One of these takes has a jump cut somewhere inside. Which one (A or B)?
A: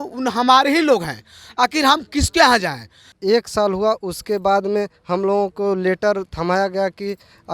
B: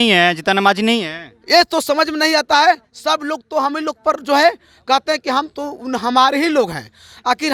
A